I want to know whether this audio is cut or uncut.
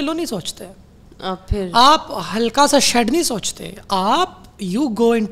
uncut